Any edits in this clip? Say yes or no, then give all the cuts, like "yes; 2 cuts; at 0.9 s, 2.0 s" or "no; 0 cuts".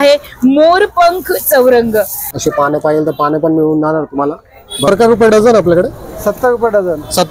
yes; 2 cuts; at 2.2 s, 4.9 s